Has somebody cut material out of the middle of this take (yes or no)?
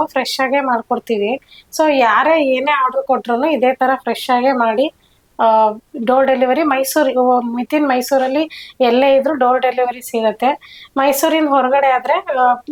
no